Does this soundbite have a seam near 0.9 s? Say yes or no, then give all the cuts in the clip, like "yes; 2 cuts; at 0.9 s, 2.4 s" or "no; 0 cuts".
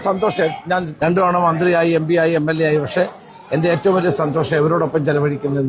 yes; 1 cut; at 0.9 s